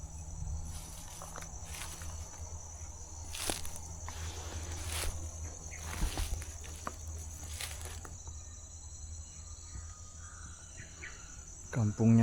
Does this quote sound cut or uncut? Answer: cut